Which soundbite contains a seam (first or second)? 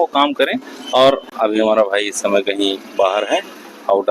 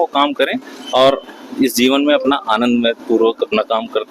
first